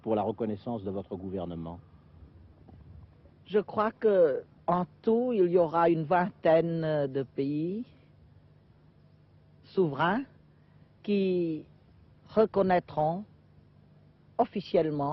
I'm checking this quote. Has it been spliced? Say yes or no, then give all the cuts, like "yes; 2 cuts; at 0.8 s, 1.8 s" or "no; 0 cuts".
no; 0 cuts